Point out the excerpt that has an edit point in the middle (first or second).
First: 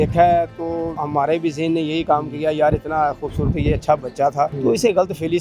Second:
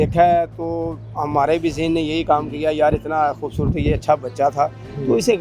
first